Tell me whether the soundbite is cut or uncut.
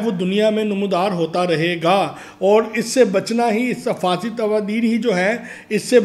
uncut